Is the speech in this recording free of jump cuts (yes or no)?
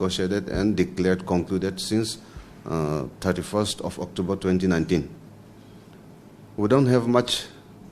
yes